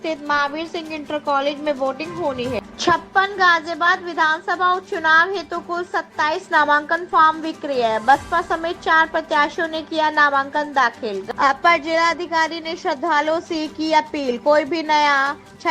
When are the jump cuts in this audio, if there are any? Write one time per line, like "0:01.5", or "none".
0:02.6
0:11.2